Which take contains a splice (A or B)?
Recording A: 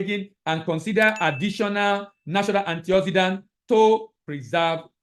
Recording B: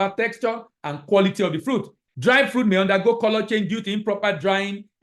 B